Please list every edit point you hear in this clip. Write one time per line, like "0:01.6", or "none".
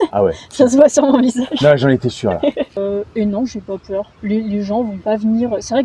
0:02.8